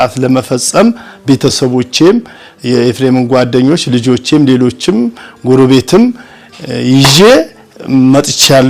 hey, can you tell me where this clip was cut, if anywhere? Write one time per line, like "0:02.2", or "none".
none